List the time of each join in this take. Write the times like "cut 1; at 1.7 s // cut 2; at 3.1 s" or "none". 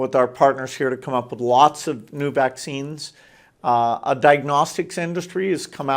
none